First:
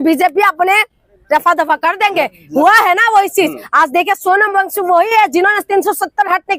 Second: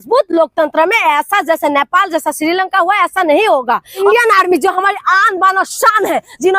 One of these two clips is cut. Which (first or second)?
second